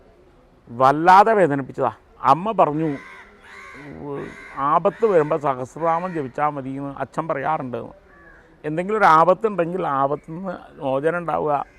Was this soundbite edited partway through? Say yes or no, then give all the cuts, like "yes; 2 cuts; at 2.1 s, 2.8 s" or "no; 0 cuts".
yes; 1 cut; at 2.1 s